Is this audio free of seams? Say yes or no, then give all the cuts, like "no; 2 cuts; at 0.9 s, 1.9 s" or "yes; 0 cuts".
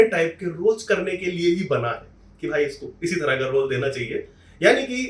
yes; 0 cuts